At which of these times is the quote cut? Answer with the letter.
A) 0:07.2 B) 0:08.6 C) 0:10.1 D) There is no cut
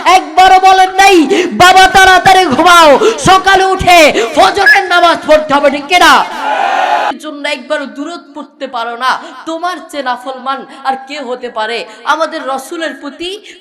A